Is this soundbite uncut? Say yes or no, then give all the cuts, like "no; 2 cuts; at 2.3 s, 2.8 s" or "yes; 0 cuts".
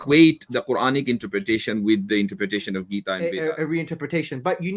no; 1 cut; at 3.1 s